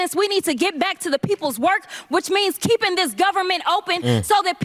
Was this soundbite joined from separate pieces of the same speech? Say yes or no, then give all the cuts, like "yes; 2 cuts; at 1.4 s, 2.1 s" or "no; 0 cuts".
no; 0 cuts